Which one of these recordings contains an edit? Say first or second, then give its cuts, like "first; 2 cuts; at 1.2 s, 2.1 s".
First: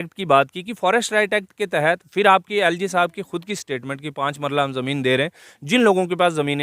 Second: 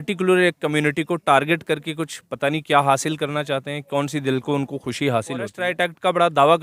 second; 1 cut; at 5.6 s